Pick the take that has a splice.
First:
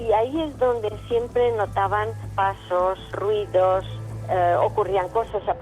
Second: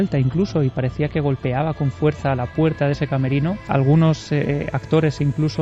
second; 1 cut; at 3.6 s

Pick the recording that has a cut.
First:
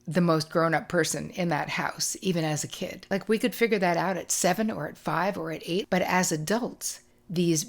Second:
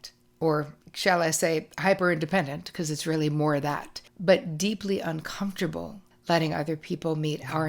first; 2 cuts; at 3.0 s, 5.8 s

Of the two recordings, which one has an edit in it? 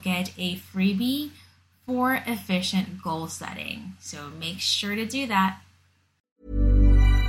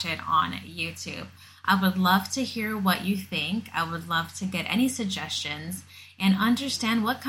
first; 1 cut; at 6.1 s

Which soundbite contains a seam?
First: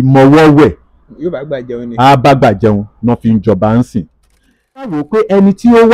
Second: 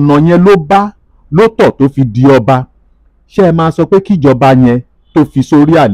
first; 1 cut; at 4.8 s

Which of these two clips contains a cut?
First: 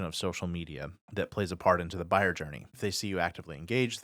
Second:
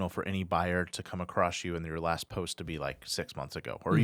first; 2 cuts; at 0.9 s, 2.7 s

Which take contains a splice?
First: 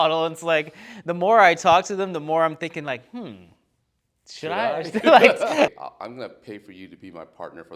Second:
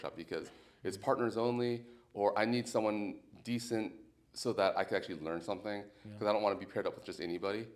first; 1 cut; at 5.8 s

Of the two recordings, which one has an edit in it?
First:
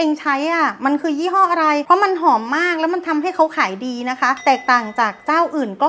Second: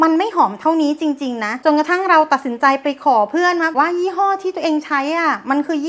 second; 1 cut; at 3.7 s

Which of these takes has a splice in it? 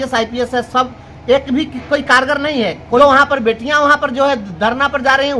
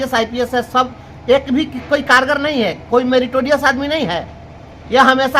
first; 1 cut; at 3.0 s

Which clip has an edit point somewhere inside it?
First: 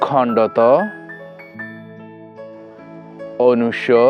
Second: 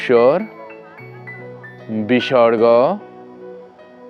first; 2 cuts; at 1.1 s, 2.6 s

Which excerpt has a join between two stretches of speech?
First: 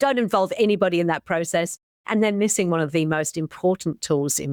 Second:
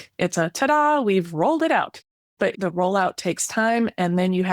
second; 1 cut; at 2.6 s

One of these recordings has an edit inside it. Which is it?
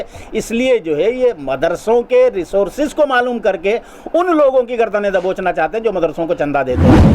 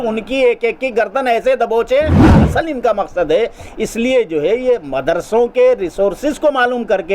second; 1 cut; at 2.2 s

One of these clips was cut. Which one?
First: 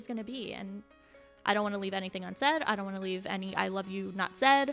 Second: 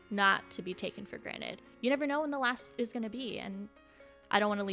second; 1 cut; at 1.6 s

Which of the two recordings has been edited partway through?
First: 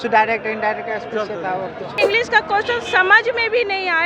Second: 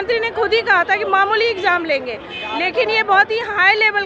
first; 1 cut; at 2.0 s

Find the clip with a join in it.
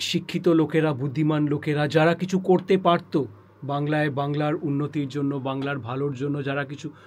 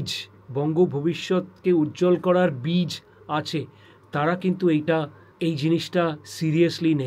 second; 1 cut; at 5.2 s

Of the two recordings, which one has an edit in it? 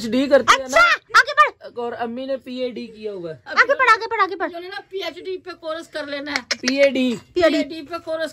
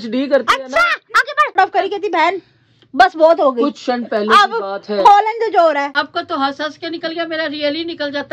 second; 2 cuts; at 1.6 s, 6.0 s

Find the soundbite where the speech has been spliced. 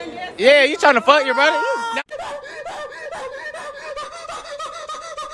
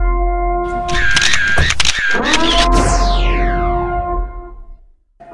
first; 1 cut; at 2.1 s

